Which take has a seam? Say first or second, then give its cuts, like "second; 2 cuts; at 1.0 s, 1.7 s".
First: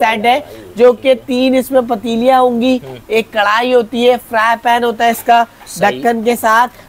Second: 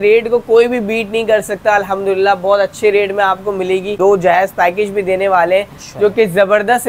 second; 1 cut; at 3.9 s